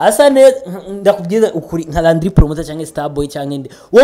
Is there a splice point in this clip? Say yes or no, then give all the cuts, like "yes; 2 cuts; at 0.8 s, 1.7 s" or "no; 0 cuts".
no; 0 cuts